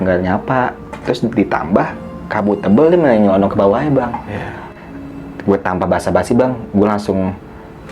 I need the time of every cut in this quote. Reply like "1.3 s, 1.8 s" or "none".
4.7 s